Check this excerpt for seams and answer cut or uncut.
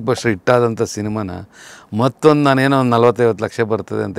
uncut